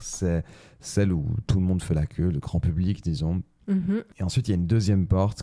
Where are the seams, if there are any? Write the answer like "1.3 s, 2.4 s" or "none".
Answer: none